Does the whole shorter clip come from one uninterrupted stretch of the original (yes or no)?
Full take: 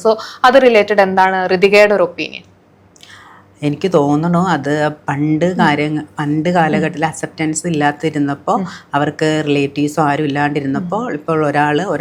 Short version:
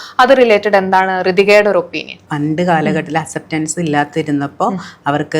no